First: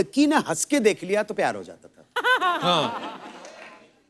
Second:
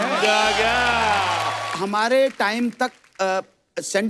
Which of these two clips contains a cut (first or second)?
second